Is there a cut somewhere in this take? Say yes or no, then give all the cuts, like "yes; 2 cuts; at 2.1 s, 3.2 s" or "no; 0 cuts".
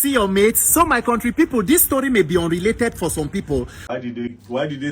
yes; 1 cut; at 3.8 s